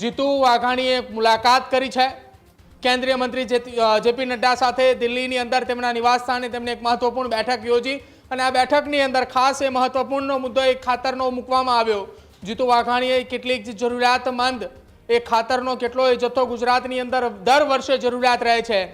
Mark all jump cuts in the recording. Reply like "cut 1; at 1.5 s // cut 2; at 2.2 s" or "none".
none